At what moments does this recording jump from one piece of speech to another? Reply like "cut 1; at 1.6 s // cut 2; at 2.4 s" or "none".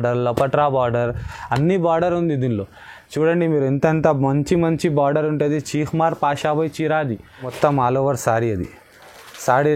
cut 1; at 7.5 s